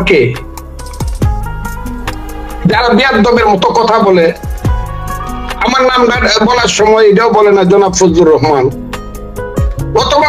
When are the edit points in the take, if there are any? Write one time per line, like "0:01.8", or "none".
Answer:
none